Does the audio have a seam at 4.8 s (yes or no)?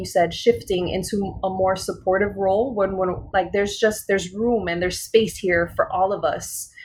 no